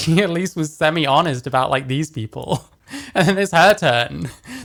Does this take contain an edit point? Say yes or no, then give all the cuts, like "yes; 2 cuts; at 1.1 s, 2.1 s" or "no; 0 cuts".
no; 0 cuts